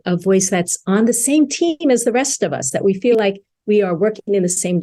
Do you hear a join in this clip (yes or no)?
no